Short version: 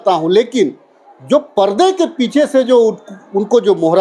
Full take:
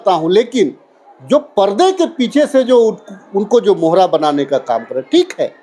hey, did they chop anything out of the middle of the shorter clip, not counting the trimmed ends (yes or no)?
no